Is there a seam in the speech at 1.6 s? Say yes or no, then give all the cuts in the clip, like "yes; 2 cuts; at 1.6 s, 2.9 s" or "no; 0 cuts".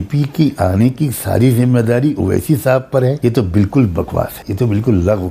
no; 2 cuts; at 3.2 s, 4.4 s